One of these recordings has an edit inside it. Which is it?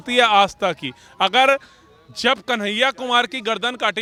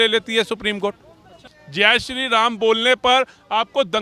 second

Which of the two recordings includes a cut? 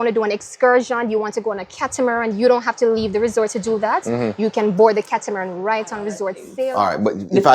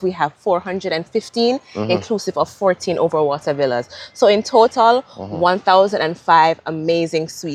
first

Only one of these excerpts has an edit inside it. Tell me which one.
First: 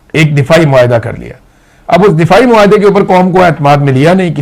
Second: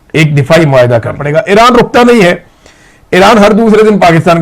second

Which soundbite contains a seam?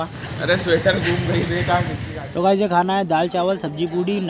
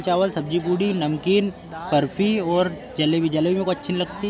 first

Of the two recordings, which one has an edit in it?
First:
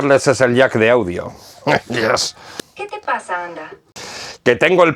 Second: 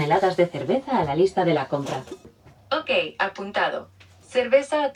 first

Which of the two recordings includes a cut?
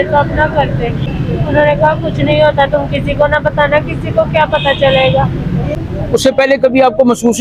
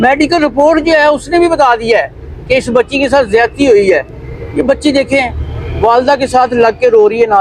first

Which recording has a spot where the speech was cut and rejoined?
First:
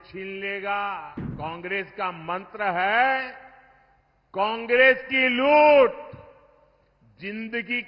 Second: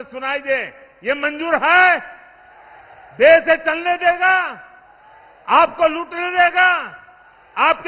first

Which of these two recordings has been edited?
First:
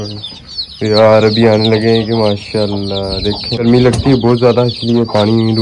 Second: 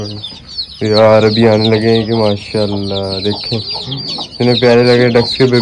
first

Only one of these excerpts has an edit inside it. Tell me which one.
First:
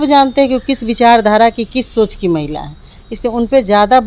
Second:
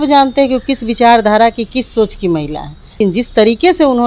second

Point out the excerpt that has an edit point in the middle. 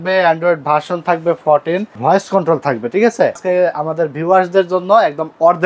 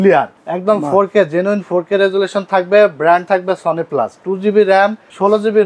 first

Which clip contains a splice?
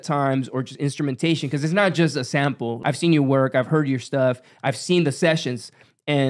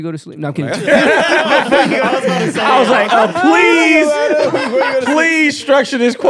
first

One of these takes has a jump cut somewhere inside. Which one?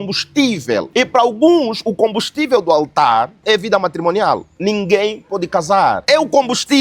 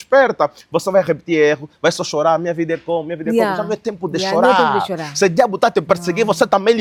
first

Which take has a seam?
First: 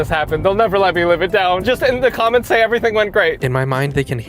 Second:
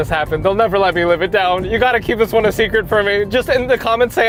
first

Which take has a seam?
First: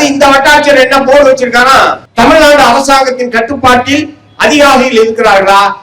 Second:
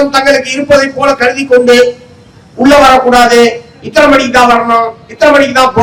first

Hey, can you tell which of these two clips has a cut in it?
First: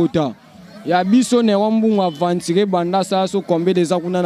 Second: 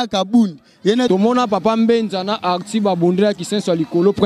second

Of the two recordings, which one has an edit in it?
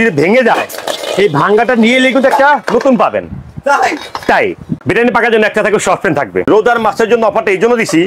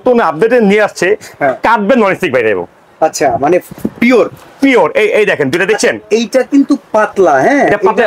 first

